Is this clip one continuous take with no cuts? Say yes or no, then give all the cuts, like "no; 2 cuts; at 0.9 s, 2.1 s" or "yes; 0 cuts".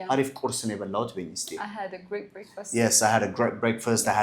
yes; 0 cuts